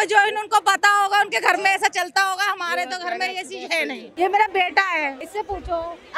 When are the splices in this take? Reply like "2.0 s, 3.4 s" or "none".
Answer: 4.1 s, 5.2 s